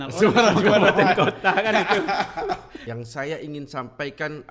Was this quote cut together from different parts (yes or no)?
yes